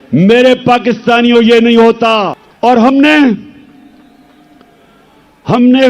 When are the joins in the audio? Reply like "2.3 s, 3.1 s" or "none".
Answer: 2.4 s